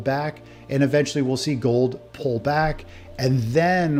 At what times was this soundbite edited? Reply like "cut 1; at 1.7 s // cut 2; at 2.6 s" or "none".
none